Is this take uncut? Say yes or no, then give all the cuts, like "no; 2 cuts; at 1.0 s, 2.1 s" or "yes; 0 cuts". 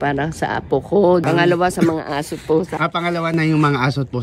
no; 2 cuts; at 1.2 s, 2.7 s